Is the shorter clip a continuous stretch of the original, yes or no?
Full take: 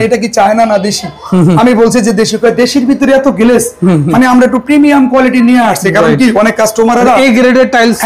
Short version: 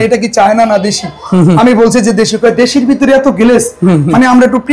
yes